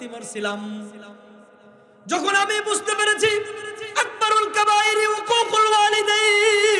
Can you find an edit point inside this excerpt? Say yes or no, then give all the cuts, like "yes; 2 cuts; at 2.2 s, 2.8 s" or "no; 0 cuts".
no; 0 cuts